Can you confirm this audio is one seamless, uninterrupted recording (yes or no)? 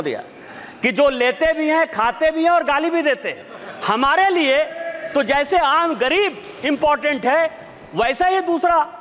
yes